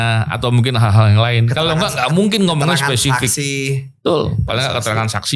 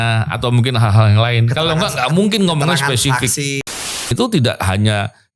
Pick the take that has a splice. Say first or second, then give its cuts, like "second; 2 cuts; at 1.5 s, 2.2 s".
second; 1 cut; at 4.0 s